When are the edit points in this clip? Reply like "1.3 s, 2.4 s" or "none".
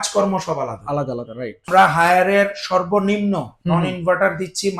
1.7 s